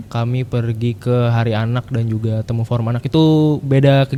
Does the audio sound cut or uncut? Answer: uncut